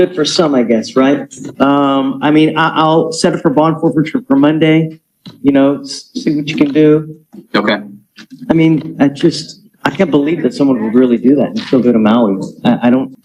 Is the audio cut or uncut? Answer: uncut